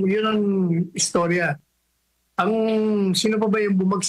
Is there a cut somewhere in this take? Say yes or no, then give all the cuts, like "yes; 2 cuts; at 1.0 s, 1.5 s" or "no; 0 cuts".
no; 0 cuts